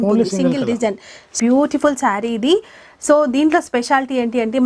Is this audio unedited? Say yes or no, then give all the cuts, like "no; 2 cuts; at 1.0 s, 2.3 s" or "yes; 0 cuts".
no; 1 cut; at 1.3 s